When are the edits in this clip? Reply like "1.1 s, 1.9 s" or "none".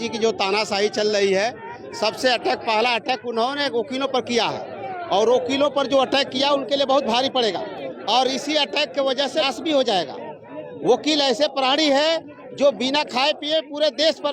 none